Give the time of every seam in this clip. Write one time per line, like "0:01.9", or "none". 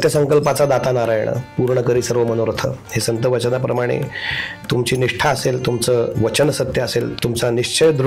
0:06.1
0:07.1